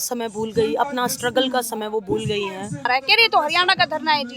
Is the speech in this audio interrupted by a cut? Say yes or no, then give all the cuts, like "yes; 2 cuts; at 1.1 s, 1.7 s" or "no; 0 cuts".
yes; 1 cut; at 2.9 s